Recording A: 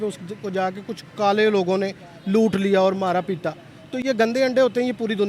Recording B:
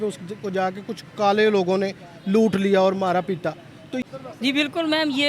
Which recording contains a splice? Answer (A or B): B